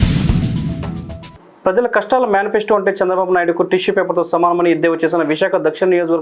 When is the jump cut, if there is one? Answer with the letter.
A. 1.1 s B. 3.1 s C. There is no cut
A